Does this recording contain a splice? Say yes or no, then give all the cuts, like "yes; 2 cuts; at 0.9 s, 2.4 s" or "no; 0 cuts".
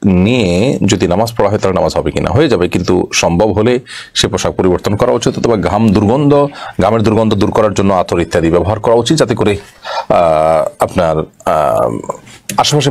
no; 0 cuts